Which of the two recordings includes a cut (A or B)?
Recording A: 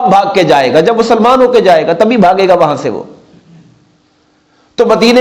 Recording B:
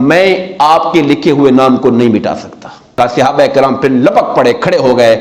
B